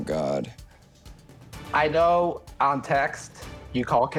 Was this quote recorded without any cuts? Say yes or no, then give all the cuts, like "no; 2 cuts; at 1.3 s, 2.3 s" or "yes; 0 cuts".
yes; 0 cuts